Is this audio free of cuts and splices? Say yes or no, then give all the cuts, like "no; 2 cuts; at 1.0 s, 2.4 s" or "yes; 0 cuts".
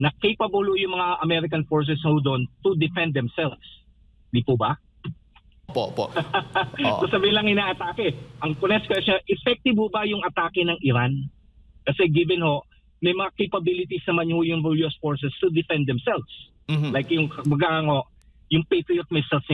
yes; 0 cuts